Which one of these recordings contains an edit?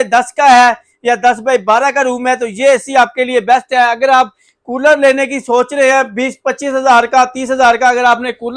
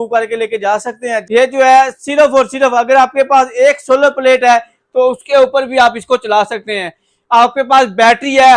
second; 1 cut; at 1.2 s

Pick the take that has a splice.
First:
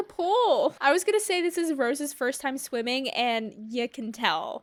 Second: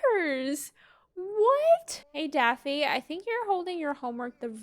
second; 1 cut; at 1.9 s

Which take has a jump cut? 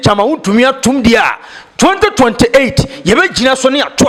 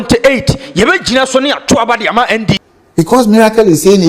second; 1 cut; at 3.1 s

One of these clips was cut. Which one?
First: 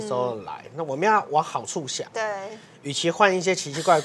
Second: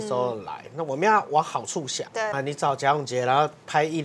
second; 1 cut; at 2.4 s

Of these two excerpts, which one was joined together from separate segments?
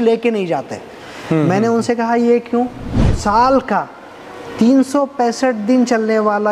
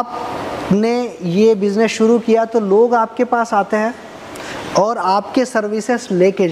first; 1 cut; at 3.2 s

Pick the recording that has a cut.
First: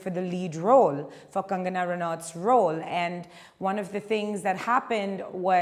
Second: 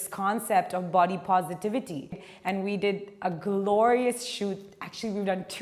second; 1 cut; at 2.3 s

